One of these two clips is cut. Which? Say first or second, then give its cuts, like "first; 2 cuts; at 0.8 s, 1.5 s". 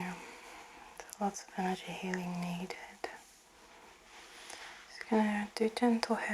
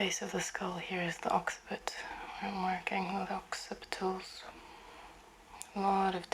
first; 1 cut; at 3.7 s